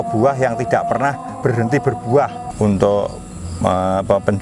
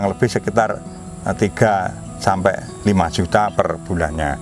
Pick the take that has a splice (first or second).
first